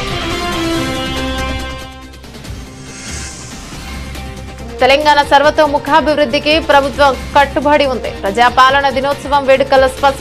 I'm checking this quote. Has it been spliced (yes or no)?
yes